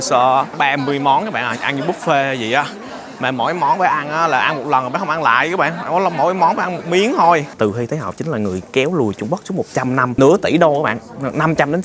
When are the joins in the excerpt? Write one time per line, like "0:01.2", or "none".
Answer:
0:07.5
0:10.1